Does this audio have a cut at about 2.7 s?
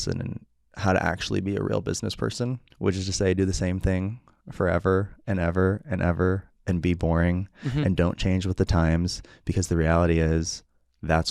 yes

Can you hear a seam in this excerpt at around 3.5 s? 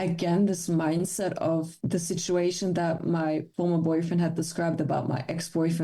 yes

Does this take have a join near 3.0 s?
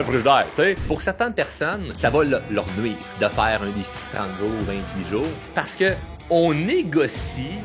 yes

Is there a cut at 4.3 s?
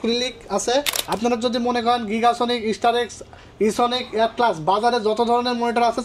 no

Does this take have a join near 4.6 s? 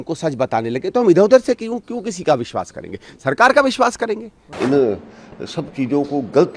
yes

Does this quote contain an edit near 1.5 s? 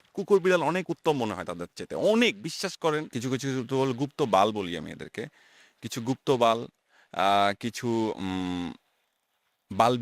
no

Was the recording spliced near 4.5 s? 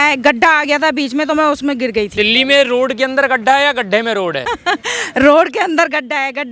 yes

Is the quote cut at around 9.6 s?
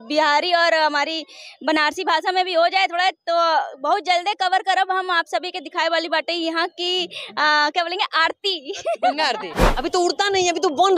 yes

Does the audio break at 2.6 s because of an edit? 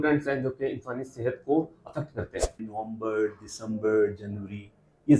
yes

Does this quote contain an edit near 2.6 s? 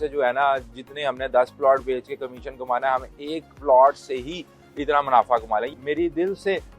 no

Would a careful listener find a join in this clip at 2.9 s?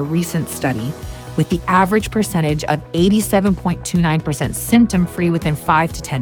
no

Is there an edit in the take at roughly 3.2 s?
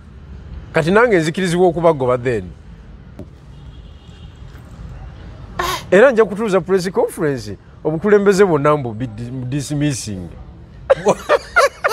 yes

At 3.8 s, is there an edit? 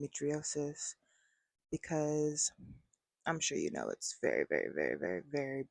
no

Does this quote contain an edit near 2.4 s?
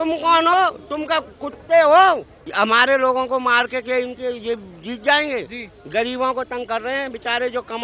yes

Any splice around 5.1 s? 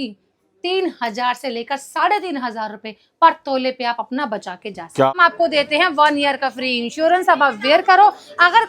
yes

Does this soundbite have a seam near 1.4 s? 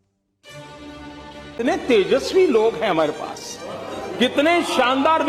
yes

